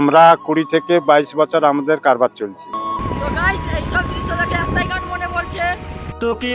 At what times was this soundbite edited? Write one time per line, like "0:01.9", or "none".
0:02.8